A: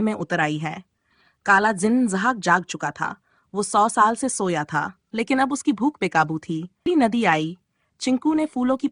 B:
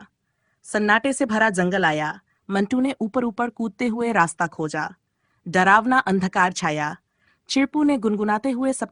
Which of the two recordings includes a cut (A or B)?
A